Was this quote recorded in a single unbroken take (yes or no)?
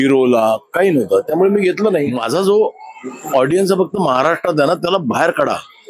no